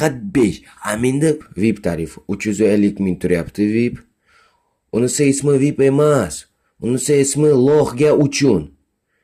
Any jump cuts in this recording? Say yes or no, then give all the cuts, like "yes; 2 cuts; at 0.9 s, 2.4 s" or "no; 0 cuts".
no; 0 cuts